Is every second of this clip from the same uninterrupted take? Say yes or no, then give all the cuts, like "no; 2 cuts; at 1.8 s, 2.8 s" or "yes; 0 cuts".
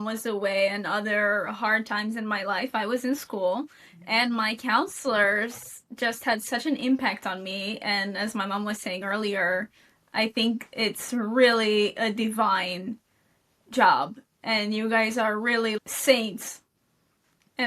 no; 1 cut; at 15.8 s